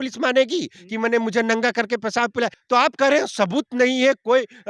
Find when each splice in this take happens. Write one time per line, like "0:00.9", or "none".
0:02.6